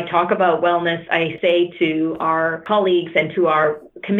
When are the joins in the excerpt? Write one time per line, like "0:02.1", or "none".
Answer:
0:01.3
0:02.6